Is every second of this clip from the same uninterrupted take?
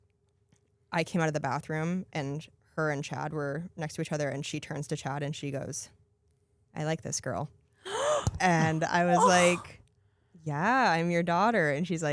yes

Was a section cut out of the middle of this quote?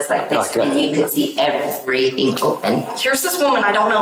yes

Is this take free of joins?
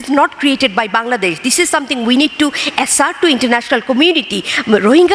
yes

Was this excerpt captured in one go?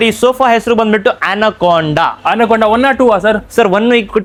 yes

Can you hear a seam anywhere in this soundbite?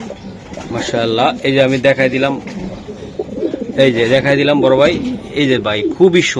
no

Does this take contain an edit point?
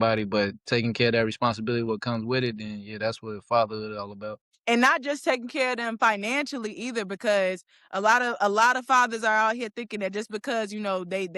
yes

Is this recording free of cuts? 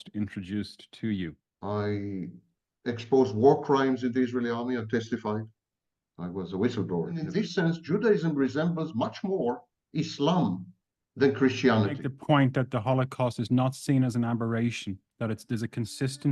no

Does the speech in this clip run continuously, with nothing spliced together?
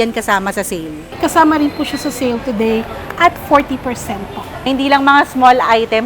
no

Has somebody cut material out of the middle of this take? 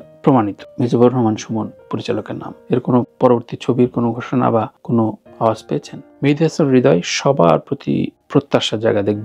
yes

